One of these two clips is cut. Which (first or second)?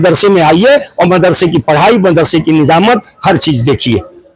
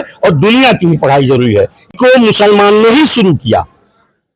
second